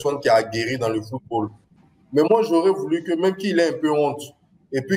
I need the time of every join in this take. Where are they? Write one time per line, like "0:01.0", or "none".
0:01.7